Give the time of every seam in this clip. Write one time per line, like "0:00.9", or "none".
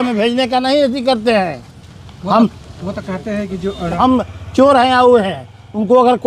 0:04.0